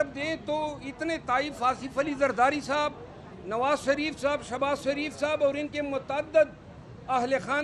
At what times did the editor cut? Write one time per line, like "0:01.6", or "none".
none

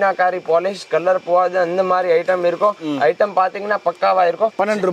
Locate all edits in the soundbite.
none

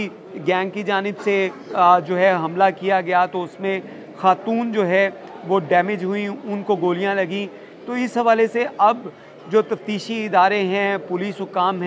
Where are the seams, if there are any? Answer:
none

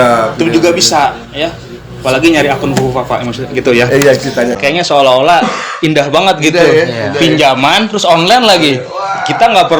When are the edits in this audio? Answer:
0:04.6

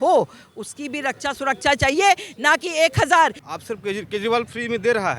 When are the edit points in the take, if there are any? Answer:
0:03.5

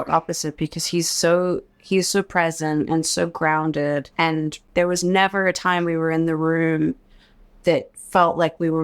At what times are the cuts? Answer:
0:04.6

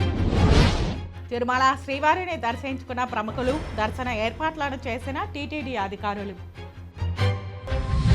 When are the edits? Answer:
0:01.1

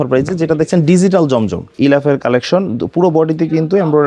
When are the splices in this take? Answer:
0:01.7

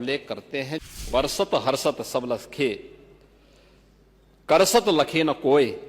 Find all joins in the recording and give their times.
0:01.0

